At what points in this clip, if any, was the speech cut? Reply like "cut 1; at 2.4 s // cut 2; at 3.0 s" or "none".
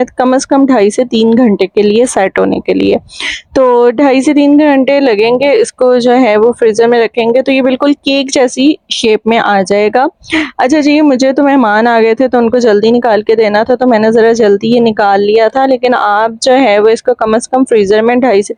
none